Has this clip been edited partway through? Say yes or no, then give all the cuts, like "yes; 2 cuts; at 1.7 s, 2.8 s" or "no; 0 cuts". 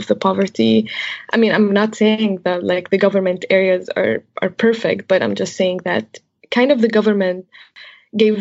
yes; 1 cut; at 6.4 s